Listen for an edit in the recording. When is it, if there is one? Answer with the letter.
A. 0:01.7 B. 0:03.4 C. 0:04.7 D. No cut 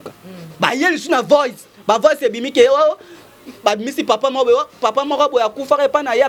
D